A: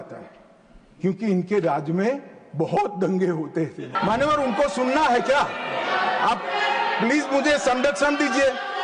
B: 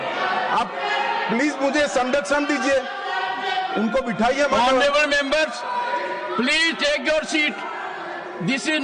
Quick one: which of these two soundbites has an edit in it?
A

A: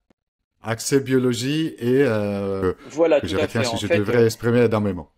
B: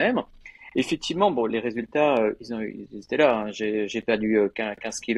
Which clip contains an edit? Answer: A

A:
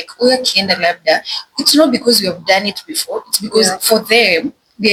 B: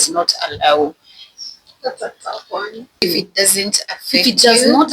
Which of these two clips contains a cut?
B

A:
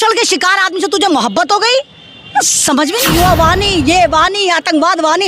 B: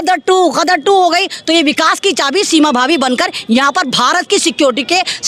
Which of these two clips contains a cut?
A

